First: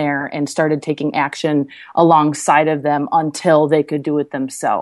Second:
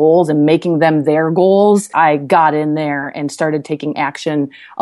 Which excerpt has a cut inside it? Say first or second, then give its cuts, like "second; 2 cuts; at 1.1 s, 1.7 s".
second; 1 cut; at 1.9 s